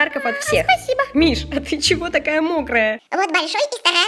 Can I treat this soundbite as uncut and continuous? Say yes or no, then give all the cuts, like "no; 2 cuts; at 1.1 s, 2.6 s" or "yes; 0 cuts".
no; 1 cut; at 2.9 s